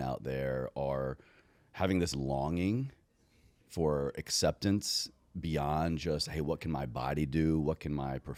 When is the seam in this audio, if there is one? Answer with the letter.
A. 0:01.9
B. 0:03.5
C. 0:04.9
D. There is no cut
D